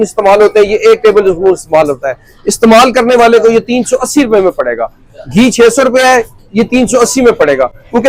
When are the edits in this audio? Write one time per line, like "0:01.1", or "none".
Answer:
none